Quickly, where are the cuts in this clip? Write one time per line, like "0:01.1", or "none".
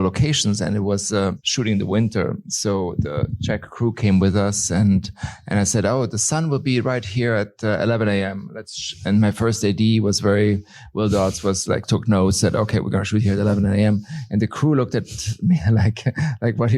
0:01.5